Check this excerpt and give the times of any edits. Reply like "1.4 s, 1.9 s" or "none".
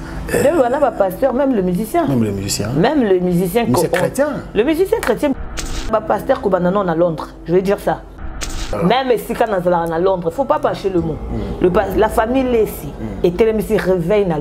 5.8 s, 8.5 s